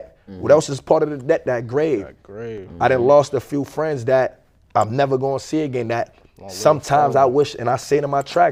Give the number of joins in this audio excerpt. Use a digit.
0